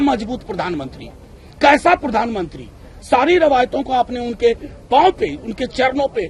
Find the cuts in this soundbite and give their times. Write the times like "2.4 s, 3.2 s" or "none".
none